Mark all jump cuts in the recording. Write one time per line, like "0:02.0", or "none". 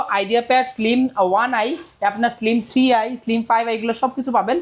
none